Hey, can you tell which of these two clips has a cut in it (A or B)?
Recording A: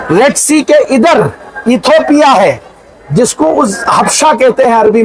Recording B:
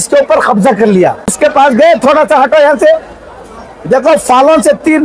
B